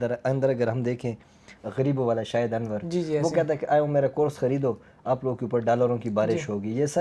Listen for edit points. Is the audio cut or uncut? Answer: uncut